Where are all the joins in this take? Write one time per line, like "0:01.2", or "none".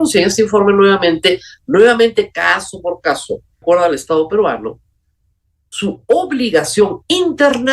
0:03.6